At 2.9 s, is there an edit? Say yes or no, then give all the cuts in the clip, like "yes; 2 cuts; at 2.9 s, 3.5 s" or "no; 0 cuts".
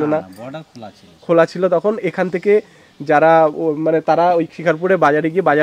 no; 0 cuts